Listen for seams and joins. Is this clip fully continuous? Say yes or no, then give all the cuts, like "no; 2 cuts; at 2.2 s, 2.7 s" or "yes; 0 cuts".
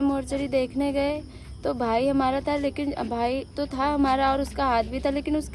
yes; 0 cuts